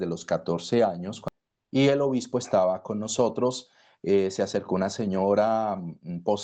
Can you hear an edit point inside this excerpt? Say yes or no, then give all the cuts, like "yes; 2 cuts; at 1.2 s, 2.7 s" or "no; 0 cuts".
yes; 1 cut; at 1.3 s